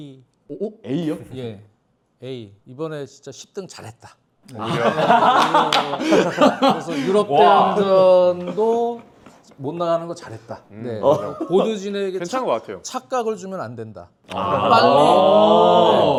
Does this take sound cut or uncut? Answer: uncut